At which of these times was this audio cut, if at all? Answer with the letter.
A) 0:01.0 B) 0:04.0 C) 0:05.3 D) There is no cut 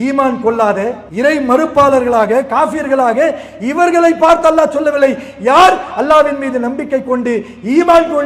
A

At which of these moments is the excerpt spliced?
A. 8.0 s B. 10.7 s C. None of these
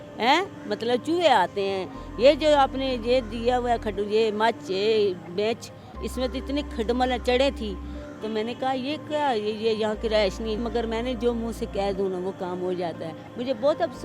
B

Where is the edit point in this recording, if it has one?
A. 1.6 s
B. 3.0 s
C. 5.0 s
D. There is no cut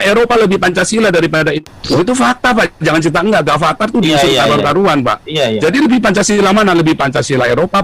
A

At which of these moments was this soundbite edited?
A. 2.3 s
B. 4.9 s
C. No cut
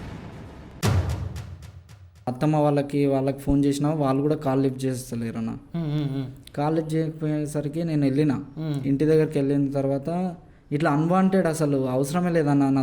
A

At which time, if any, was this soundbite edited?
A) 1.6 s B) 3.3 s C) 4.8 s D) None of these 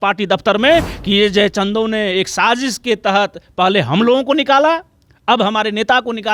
D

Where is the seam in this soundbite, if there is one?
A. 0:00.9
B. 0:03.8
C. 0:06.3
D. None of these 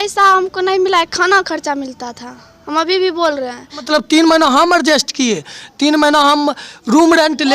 B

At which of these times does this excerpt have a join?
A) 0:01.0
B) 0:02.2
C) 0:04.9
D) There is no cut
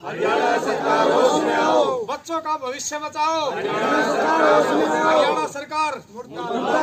D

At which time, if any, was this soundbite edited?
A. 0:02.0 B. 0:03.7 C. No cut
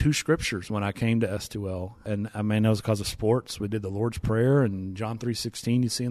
A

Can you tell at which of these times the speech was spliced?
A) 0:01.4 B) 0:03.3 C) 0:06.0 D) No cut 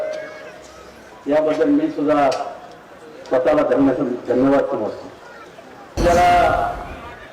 C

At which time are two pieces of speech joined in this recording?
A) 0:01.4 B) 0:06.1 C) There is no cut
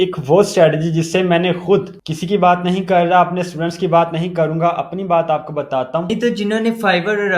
B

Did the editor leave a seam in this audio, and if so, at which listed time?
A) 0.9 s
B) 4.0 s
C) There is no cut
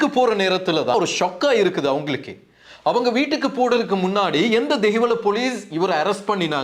A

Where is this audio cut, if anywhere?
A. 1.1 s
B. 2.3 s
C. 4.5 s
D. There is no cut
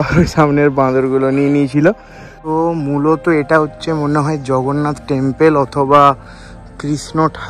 B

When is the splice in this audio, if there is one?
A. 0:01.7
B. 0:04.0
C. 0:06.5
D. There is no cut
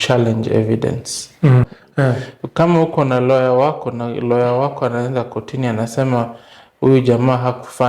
A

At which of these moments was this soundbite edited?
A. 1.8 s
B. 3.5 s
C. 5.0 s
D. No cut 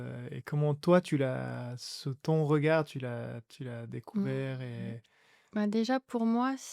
C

